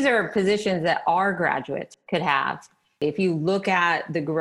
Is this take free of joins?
no; 2 cuts; at 1.9 s, 3.0 s

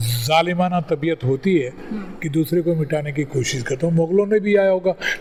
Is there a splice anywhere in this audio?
no; 0 cuts

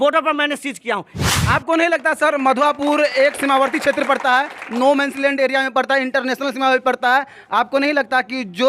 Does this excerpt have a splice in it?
yes; 1 cut; at 1.1 s

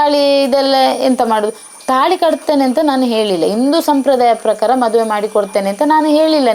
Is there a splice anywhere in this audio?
no; 0 cuts

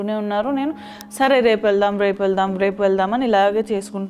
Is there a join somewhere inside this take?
no; 0 cuts

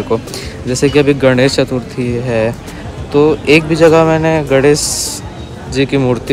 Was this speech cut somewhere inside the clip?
no; 0 cuts

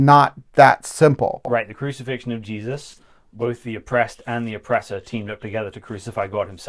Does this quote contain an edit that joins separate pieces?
yes; 1 cut; at 1.4 s

